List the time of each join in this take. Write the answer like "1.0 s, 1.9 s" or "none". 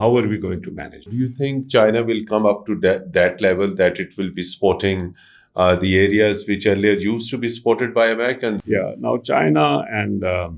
1.1 s, 8.6 s